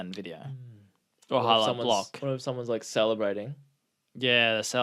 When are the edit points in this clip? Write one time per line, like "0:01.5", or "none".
none